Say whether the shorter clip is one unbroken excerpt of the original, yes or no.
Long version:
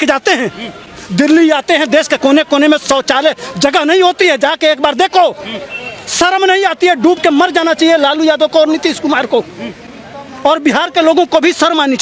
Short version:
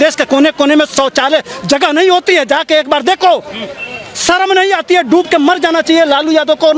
yes